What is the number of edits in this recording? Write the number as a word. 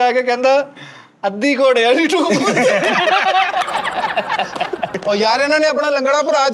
one